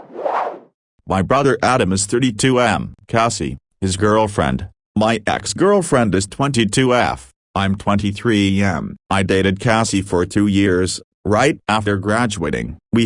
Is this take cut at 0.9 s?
yes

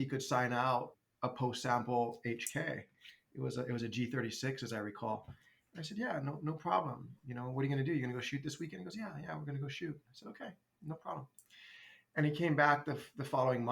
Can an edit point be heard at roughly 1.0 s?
yes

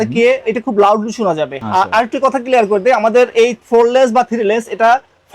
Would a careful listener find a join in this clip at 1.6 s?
no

